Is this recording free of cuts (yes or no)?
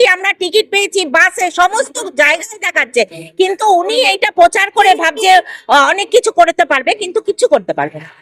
yes